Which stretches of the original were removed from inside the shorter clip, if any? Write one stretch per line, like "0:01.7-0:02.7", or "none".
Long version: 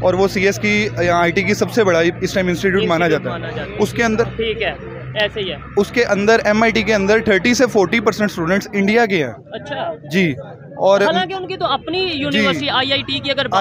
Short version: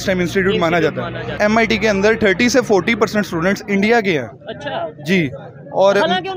0:03.7-0:06.4